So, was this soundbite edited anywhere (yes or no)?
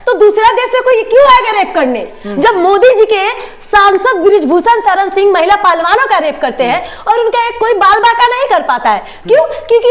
no